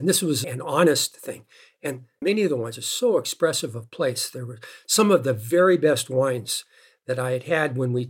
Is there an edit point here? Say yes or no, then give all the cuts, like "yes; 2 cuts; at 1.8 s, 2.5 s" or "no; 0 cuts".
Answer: no; 0 cuts